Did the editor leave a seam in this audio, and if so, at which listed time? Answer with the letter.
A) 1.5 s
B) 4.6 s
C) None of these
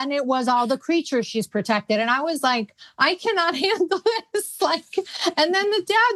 C